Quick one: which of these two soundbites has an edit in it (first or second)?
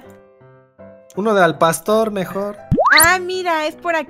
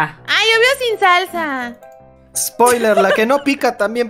first